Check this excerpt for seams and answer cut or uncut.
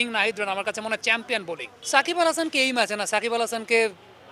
cut